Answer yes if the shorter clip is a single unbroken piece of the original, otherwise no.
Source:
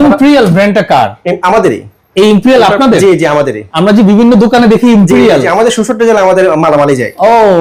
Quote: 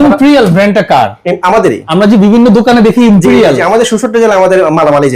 no